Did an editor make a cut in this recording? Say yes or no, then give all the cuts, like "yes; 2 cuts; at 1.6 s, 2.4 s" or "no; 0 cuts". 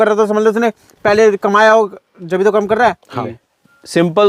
yes; 1 cut; at 3.1 s